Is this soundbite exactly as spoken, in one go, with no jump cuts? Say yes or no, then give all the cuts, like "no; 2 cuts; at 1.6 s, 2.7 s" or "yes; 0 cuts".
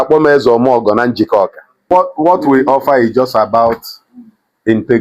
no; 1 cut; at 1.9 s